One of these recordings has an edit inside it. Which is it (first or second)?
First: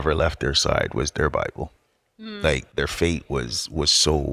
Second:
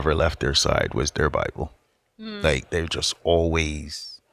first